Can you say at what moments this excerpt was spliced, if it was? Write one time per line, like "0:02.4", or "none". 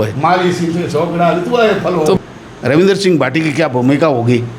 0:02.2